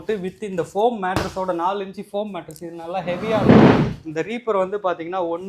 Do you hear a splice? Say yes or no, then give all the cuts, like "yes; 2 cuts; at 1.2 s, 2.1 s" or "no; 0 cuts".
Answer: no; 0 cuts